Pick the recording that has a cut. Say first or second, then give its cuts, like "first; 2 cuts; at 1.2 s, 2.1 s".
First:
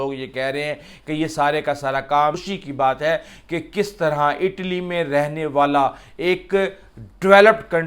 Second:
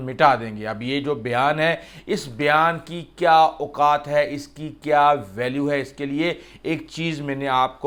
first; 1 cut; at 2.4 s